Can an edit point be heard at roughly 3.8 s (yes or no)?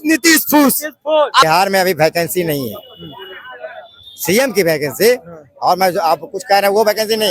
no